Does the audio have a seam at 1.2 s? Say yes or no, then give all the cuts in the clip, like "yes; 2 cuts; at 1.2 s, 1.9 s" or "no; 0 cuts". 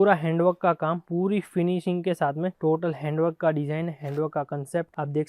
no; 1 cut; at 2.5 s